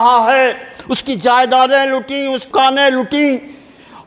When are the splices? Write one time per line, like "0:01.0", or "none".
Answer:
0:02.5